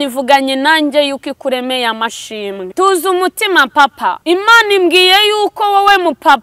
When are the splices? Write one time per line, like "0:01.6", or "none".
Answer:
0:02.7
0:04.2